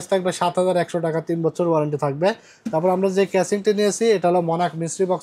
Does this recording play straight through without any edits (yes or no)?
yes